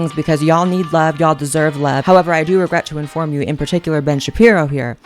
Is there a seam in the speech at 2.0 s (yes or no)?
yes